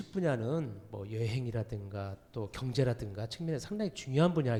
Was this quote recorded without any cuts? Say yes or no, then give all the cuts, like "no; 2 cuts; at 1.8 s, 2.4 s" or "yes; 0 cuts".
yes; 0 cuts